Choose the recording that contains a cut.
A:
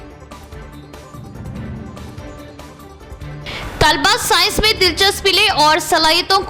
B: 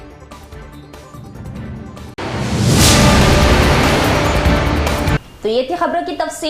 A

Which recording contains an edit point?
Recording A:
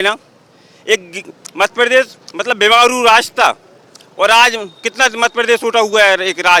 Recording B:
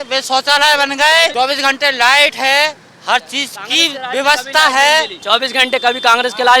B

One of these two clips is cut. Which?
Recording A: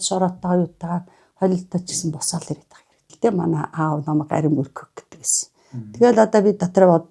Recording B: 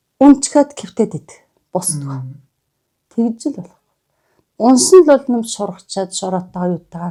A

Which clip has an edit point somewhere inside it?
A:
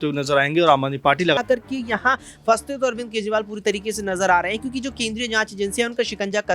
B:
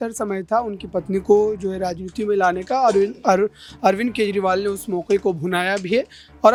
A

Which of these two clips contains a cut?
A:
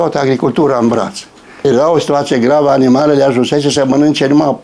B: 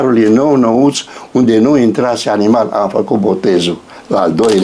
A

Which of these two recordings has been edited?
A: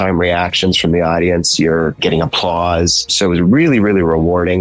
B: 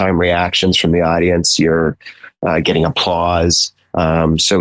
A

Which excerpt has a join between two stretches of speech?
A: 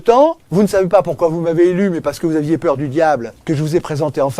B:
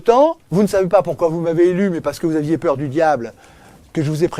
A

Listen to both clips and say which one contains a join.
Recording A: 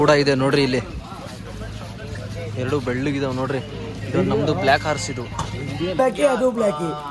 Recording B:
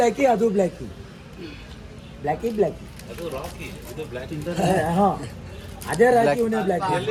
A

